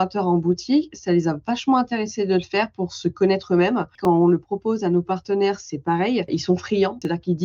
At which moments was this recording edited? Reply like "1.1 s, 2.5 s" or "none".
4.0 s